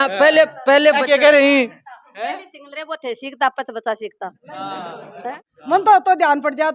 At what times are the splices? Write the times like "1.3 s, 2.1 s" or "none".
5.7 s

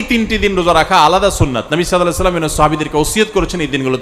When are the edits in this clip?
none

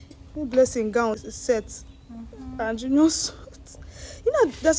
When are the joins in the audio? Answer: 1.2 s

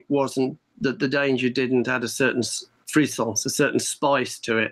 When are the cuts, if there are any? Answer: none

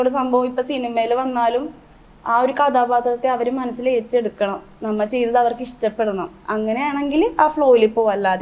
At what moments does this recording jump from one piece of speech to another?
none

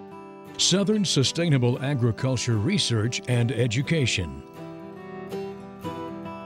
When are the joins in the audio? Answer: 4.4 s

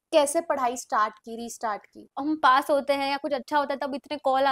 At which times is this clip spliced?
2.1 s

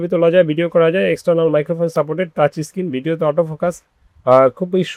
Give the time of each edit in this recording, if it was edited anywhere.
none

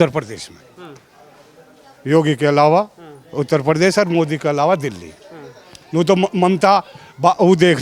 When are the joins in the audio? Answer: none

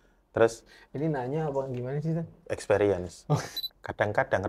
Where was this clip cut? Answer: 3.5 s

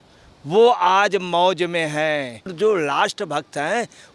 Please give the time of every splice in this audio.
2.5 s

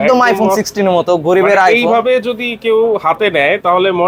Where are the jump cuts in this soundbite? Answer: none

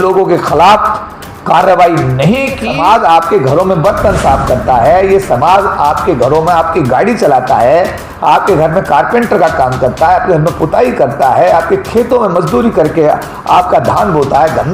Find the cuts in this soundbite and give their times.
2.7 s

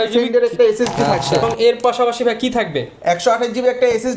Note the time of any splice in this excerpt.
1.4 s

